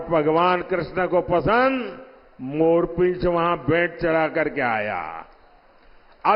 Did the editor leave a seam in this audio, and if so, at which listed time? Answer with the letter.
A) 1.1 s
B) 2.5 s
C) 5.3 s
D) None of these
D